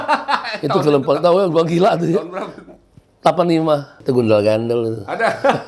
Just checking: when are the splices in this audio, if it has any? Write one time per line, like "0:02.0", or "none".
0:03.9